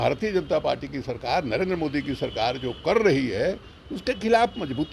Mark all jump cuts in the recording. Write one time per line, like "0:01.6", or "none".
none